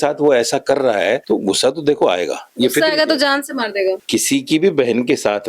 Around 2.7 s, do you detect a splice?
no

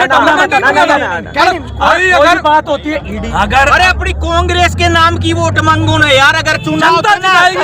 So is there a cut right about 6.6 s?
yes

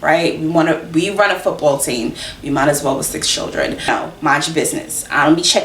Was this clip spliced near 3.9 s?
yes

